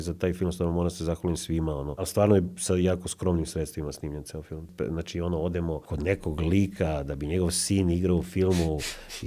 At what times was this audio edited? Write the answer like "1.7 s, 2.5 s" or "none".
2.1 s, 4.7 s, 5.9 s